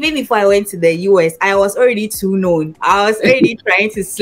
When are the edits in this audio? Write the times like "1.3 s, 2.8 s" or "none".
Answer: 2.7 s